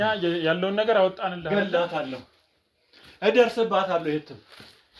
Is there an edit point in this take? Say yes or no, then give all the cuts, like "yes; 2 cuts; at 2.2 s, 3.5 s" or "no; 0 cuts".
no; 0 cuts